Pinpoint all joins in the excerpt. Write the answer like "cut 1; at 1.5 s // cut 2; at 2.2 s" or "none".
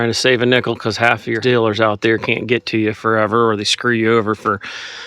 cut 1; at 1.4 s

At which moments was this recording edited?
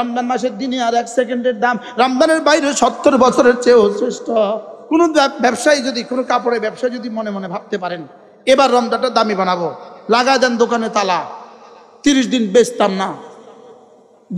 cut 1; at 4.7 s

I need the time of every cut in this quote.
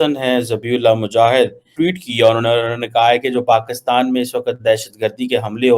cut 1; at 1.6 s

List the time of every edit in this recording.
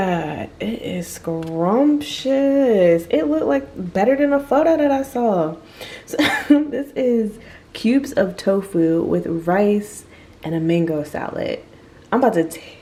none

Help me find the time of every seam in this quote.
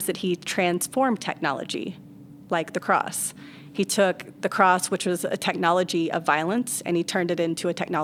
none

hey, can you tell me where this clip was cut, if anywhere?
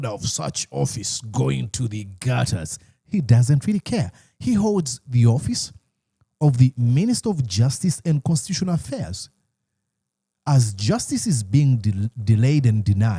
none

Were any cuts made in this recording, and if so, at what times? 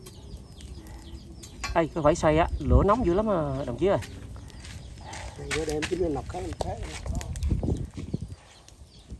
none

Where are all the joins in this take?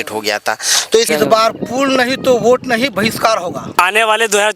cut 1; at 1.1 s // cut 2; at 3.8 s

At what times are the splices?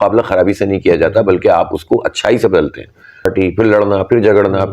cut 1; at 3.3 s

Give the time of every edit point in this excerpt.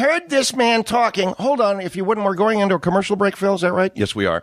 cut 1; at 1.7 s

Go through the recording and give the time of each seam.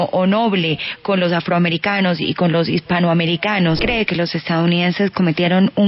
cut 1; at 3.8 s

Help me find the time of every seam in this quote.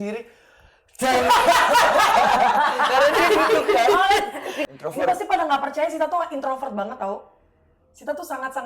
cut 1; at 4.5 s

